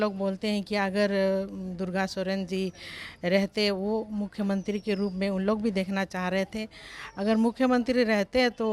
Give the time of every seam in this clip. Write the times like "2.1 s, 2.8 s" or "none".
none